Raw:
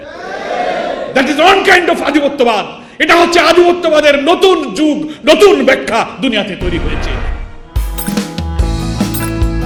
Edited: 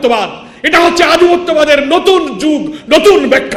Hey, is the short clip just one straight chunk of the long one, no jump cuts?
yes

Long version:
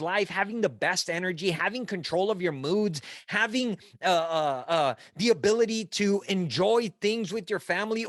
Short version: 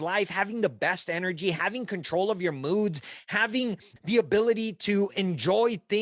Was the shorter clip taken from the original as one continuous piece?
no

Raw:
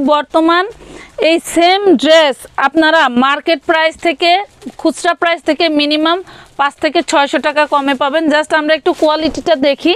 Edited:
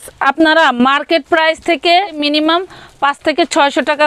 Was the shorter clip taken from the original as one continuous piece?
no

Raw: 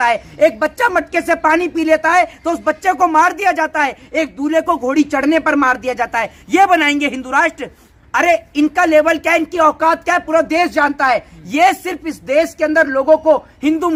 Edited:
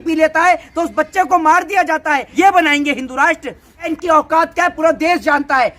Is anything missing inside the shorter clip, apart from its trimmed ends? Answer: yes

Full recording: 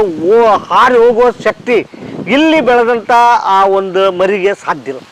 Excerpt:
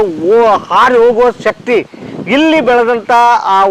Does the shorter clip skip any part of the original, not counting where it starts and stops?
no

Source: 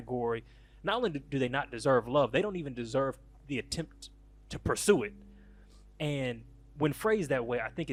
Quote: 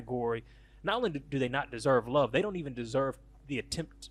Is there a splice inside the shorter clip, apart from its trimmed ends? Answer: no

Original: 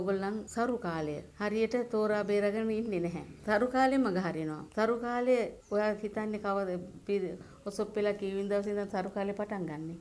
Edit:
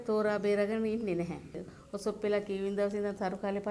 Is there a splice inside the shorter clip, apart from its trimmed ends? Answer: yes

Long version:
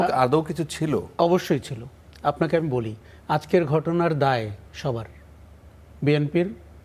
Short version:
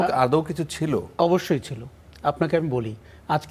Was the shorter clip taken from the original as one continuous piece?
yes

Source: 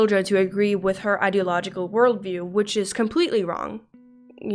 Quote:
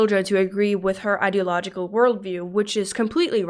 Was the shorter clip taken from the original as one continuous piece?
yes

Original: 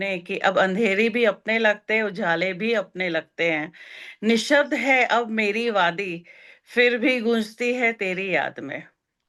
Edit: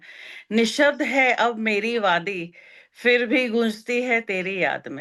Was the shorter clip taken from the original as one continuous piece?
yes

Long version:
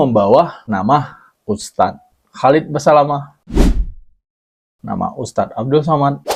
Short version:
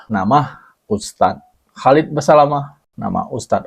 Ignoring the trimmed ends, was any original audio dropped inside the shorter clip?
yes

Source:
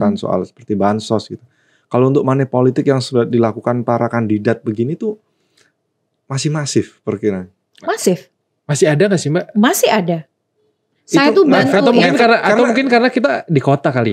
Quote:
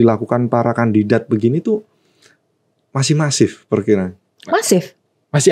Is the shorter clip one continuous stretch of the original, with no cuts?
yes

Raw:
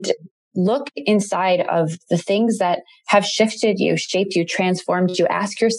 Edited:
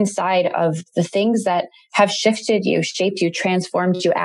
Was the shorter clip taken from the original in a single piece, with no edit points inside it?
yes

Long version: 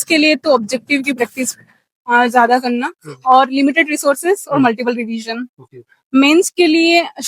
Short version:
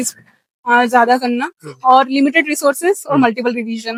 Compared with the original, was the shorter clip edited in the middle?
no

